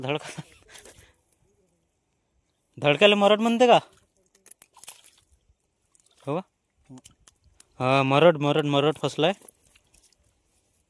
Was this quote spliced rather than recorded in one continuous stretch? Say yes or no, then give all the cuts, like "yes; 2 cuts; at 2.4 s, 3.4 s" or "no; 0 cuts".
no; 0 cuts